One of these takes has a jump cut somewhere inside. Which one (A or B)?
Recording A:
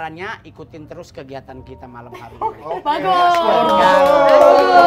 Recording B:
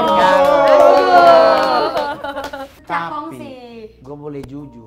B